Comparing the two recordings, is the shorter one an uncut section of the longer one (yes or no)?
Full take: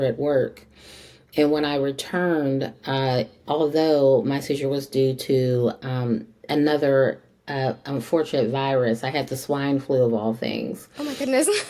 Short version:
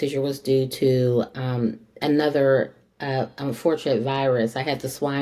yes